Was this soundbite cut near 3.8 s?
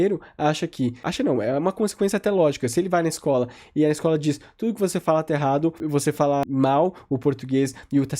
no; 2 cuts; at 1.0 s, 6.0 s

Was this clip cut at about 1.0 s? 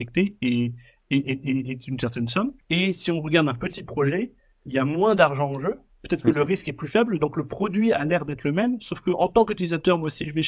no; 1 cut; at 2.6 s

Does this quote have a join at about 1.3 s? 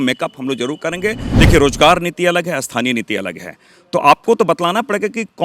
yes; 1 cut; at 1.3 s

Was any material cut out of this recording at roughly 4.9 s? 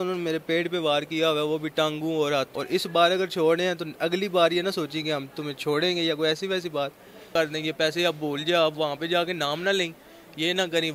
no; 2 cuts; at 2.5 s, 7.3 s

